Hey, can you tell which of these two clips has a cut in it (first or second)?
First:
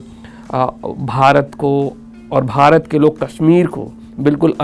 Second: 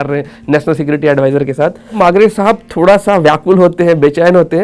second